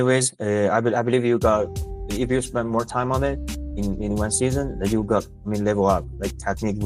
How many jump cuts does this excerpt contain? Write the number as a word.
zero